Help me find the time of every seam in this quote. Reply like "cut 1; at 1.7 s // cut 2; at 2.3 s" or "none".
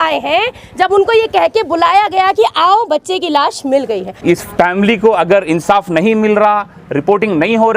cut 1; at 4.2 s